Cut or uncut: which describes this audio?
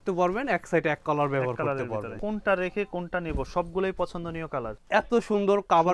cut